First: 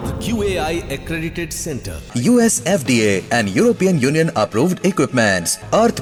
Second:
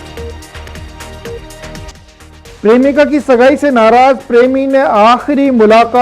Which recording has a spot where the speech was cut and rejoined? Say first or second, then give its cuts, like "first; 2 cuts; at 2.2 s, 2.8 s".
second; 1 cut; at 1.5 s